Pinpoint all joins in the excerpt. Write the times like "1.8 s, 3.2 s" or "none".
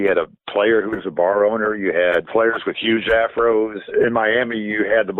2.3 s, 3.9 s

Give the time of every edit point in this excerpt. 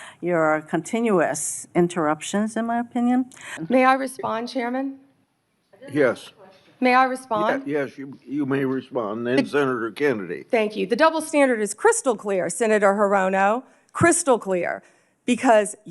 3.5 s

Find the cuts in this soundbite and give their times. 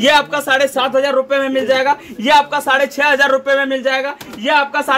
none

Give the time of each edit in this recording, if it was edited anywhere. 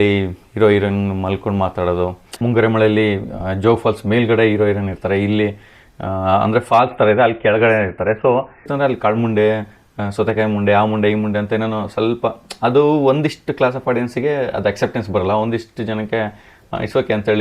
2.3 s, 8.6 s

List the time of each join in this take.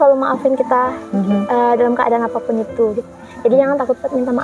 none

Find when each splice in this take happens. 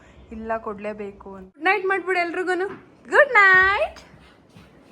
1.6 s

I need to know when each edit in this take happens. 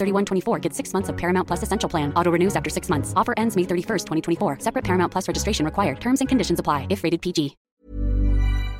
7.7 s

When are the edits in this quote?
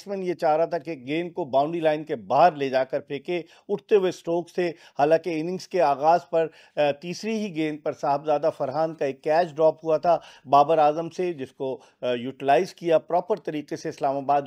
none

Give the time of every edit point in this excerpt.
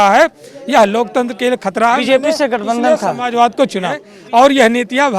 4.1 s

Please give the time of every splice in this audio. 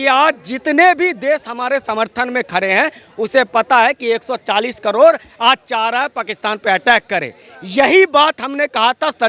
none

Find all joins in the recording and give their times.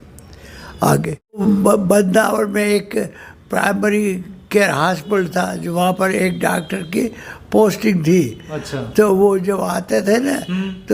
1.4 s

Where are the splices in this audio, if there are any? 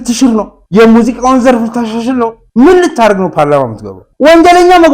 2.4 s, 4.0 s

